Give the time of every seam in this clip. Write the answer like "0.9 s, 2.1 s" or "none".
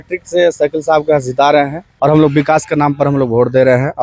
1.8 s